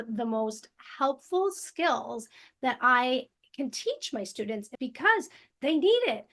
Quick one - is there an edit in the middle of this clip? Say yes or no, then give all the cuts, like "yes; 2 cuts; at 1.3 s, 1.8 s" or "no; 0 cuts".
yes; 1 cut; at 4.7 s